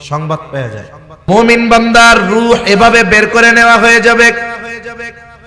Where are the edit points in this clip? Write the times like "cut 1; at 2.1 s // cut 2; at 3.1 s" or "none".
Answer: cut 1; at 1.3 s